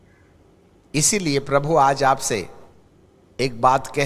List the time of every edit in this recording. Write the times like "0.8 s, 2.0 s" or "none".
0.9 s